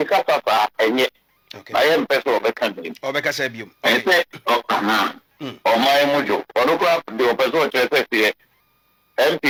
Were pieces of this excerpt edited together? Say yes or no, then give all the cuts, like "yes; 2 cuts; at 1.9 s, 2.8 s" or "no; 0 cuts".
no; 0 cuts